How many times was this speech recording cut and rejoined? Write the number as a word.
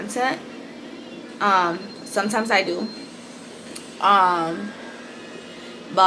zero